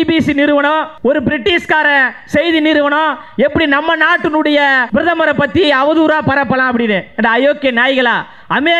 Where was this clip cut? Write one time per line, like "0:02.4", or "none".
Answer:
0:00.9
0:04.8